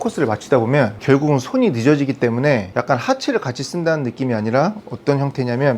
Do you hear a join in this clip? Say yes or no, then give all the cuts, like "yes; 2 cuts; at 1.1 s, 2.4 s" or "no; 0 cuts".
yes; 2 cuts; at 1.0 s, 2.7 s